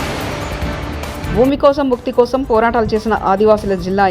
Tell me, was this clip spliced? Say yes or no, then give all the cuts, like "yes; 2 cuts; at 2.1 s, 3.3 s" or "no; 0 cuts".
yes; 1 cut; at 1.2 s